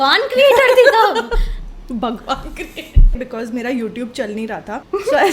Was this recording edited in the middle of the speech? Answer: yes; 1 cut; at 3.1 s

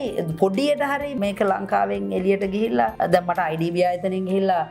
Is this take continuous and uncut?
no; 2 cuts; at 1.1 s, 2.9 s

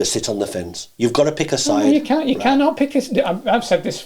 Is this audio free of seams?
yes; 0 cuts

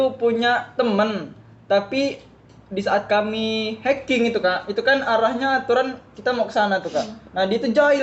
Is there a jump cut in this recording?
no; 0 cuts

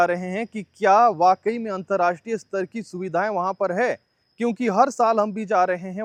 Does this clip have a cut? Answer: no; 0 cuts

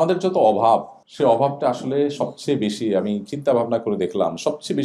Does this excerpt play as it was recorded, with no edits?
no; 1 cut; at 1.0 s

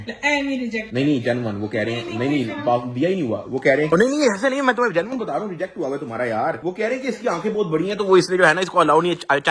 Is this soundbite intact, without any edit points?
yes; 0 cuts

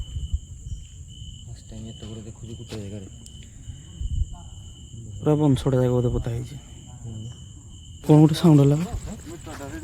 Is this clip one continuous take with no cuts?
no; 1 cut; at 8.0 s

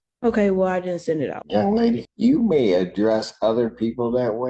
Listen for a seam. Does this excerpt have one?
yes; 2 cuts; at 1.4 s, 2.1 s

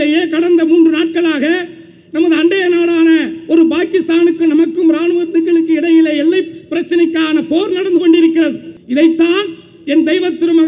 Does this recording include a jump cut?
yes; 1 cut; at 8.7 s

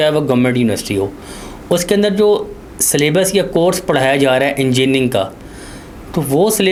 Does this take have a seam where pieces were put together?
no; 0 cuts

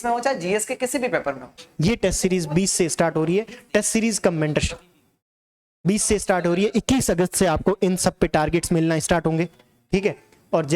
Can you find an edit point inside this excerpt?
yes; 1 cut; at 1.6 s

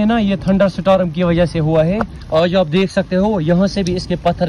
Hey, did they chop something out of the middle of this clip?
no; 0 cuts

